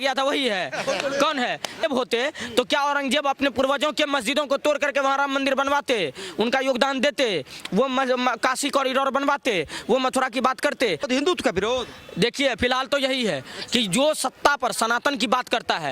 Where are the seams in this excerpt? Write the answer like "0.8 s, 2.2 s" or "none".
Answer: 1.8 s, 11.1 s